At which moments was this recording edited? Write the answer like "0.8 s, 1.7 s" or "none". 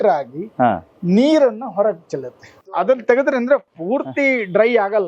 2.7 s